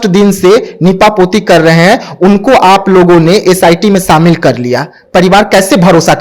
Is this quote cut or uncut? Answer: uncut